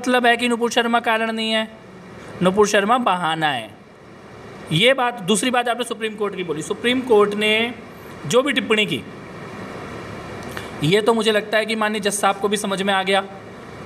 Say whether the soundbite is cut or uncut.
uncut